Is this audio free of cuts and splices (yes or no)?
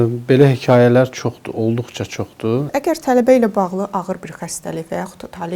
no